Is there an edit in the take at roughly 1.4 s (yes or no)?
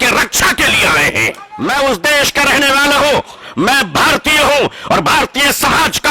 yes